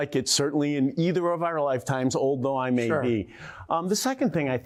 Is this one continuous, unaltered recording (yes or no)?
yes